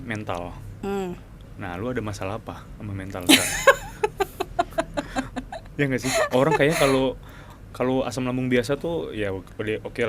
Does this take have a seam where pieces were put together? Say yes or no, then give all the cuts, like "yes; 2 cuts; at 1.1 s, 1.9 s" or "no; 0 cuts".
no; 0 cuts